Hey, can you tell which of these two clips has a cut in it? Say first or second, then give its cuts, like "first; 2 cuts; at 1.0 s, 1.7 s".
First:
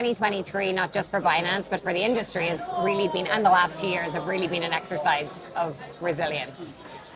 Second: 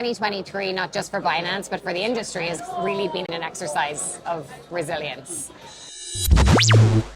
second; 2 cuts; at 3.3 s, 5.9 s